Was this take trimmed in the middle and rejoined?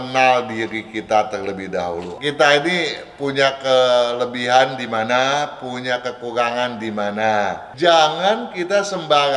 yes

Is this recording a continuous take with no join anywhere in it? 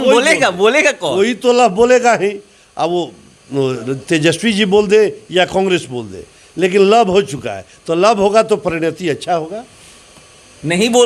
yes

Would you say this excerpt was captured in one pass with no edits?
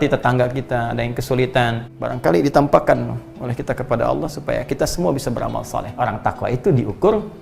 no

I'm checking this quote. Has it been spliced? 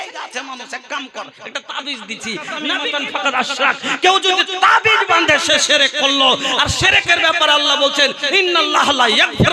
yes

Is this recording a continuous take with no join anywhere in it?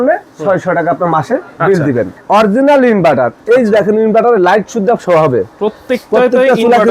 no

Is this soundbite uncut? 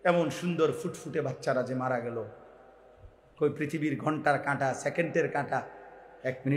yes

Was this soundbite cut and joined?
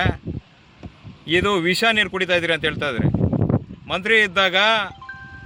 no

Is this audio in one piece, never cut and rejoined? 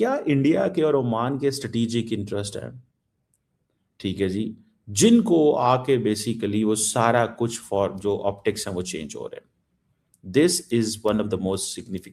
yes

